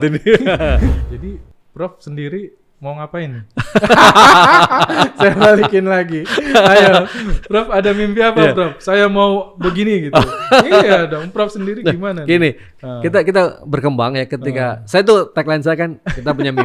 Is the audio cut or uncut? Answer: cut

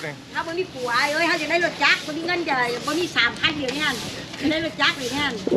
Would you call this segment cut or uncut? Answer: uncut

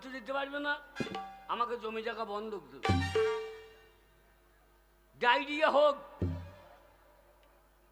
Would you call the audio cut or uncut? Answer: uncut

